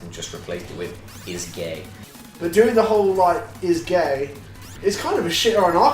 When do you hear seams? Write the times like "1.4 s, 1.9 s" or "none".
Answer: 2.4 s